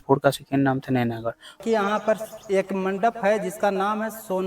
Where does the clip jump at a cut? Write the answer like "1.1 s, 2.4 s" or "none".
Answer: 1.6 s